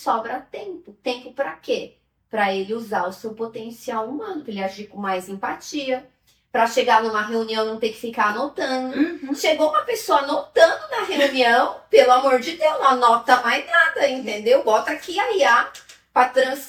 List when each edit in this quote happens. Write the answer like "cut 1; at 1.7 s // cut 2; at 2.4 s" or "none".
none

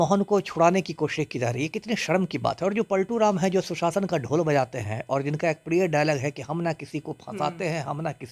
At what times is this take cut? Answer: none

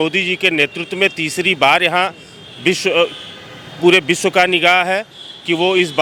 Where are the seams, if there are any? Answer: none

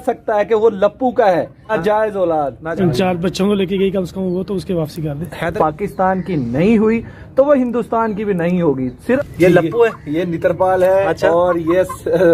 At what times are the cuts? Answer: cut 1; at 1.6 s // cut 2; at 2.6 s // cut 3; at 5.5 s // cut 4; at 8.9 s

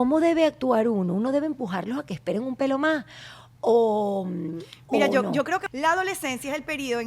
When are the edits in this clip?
cut 1; at 5.6 s

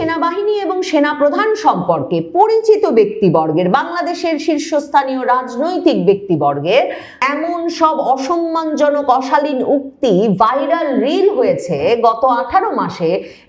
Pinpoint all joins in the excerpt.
cut 1; at 7.1 s

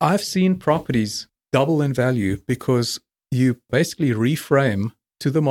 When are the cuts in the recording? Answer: cut 1; at 1.3 s

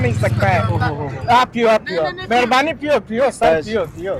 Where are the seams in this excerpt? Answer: none

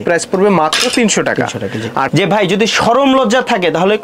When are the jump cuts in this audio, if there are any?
cut 1; at 1.8 s

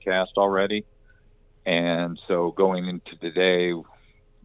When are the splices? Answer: none

